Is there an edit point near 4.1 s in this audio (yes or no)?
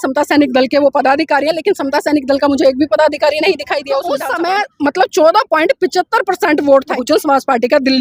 yes